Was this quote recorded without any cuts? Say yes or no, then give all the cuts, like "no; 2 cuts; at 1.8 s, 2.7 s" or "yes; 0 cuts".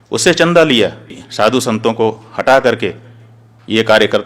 no; 1 cut; at 1.2 s